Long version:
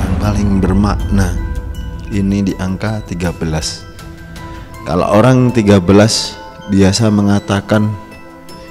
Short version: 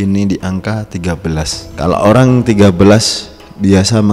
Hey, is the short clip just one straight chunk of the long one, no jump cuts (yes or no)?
no